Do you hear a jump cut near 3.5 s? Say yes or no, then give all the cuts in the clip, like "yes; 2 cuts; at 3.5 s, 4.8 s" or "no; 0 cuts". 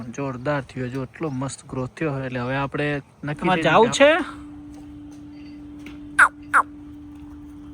yes; 1 cut; at 3.5 s